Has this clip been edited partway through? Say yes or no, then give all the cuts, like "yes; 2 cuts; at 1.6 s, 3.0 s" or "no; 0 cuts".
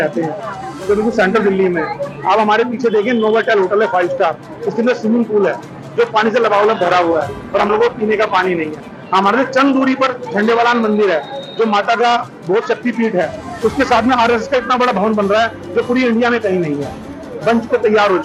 no; 0 cuts